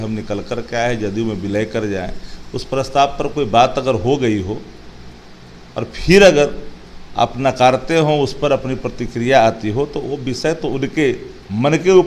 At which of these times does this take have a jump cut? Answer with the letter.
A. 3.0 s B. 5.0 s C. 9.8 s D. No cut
D